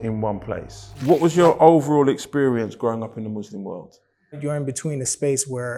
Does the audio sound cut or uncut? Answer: cut